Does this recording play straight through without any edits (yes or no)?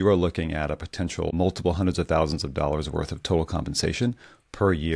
no